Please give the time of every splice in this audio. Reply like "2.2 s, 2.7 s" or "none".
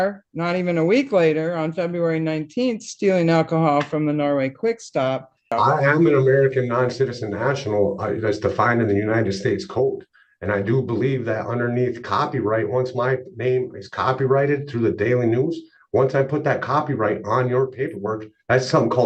5.5 s